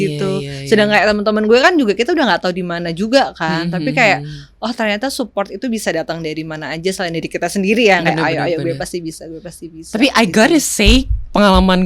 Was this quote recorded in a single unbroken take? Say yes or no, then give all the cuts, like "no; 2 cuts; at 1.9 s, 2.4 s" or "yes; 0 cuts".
yes; 0 cuts